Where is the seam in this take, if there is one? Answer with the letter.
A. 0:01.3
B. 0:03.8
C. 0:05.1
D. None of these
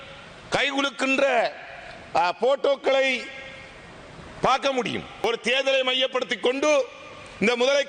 C